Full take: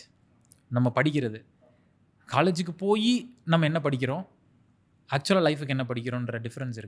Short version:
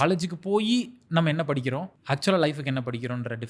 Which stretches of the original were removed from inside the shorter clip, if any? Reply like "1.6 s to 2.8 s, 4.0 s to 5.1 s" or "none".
4.3 s to 5.0 s